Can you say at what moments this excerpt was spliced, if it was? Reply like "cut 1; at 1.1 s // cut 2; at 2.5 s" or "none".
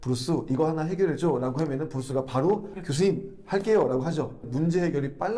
cut 1; at 4.4 s